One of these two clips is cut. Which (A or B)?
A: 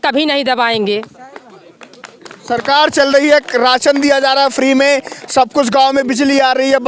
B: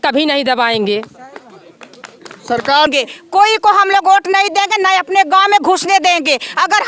B